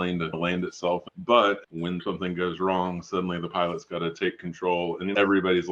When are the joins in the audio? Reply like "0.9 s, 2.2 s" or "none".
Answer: 1.1 s, 2.0 s